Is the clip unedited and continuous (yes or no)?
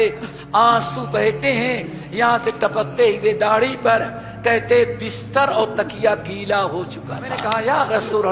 no